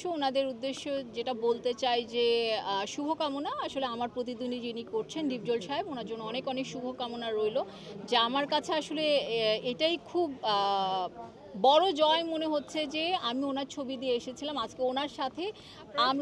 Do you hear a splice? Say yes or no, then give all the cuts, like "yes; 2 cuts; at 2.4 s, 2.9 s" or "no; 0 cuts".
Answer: no; 0 cuts